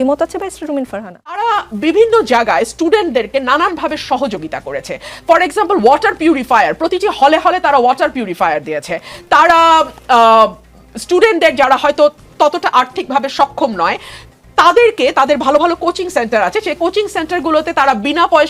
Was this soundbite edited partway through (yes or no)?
yes